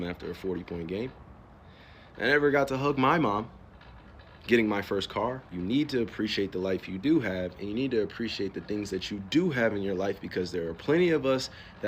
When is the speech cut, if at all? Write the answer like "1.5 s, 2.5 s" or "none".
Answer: 5.5 s